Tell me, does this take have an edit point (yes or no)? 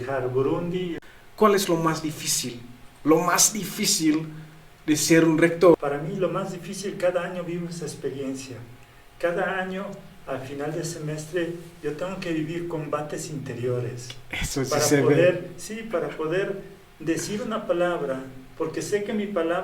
yes